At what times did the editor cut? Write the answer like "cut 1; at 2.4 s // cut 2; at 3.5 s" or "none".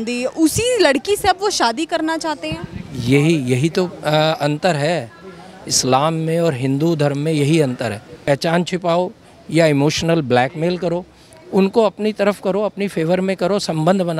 cut 1; at 8.2 s